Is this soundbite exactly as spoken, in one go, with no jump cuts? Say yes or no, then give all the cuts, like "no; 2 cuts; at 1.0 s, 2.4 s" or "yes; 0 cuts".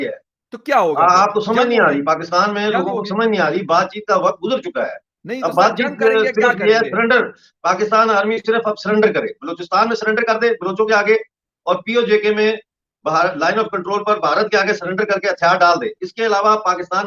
yes; 0 cuts